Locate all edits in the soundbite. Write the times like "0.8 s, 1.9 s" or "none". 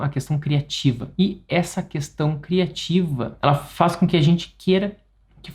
1.0 s, 3.3 s